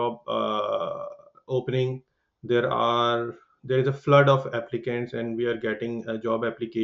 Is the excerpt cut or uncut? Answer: uncut